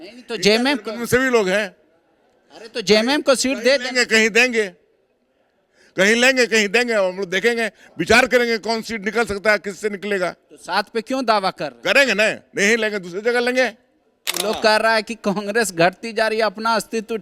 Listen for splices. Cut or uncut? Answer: cut